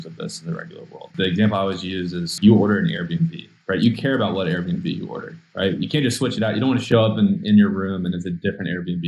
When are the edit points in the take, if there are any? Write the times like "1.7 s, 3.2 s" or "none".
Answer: 1.1 s, 2.3 s, 6.8 s